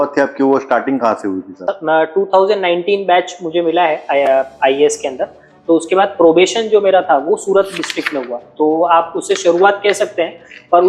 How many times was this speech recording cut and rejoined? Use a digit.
0